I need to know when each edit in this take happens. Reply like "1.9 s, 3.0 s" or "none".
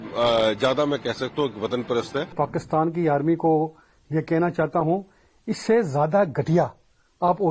2.3 s